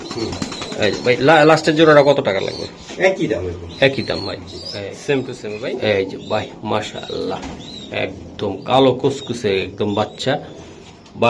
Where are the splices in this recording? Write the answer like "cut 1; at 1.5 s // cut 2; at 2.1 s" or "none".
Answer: cut 1; at 5.6 s